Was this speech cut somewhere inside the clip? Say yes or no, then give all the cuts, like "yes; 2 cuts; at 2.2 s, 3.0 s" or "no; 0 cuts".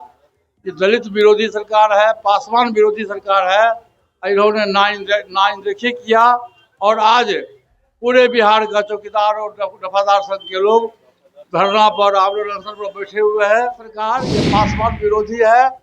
yes; 1 cut; at 14.1 s